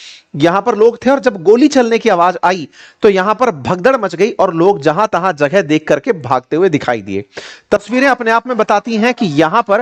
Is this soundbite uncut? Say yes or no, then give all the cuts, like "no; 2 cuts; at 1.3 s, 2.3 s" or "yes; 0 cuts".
yes; 0 cuts